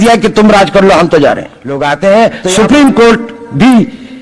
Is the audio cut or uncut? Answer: cut